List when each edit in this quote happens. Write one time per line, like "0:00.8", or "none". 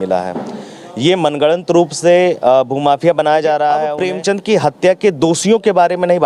0:04.0